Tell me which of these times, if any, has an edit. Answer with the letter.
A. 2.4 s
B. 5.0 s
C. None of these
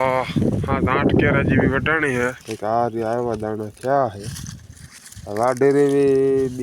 A